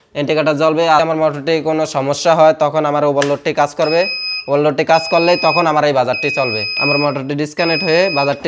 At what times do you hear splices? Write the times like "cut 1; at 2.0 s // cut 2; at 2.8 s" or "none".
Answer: cut 1; at 1.0 s // cut 2; at 6.7 s